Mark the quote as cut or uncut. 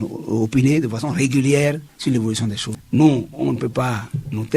cut